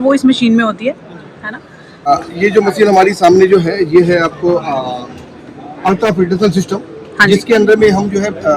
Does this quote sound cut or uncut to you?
cut